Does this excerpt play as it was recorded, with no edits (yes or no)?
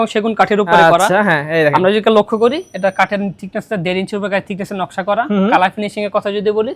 yes